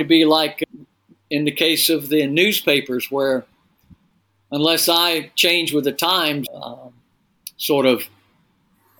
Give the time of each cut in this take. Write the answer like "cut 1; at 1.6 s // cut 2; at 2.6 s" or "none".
none